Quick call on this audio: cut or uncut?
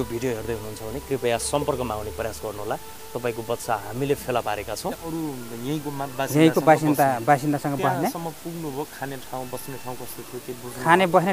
cut